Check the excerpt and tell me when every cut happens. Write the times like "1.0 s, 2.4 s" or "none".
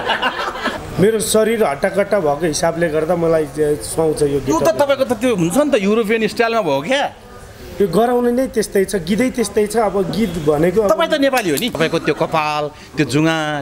0.7 s, 11.8 s